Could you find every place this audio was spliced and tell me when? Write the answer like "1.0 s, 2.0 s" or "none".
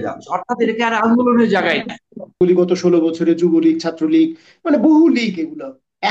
2.4 s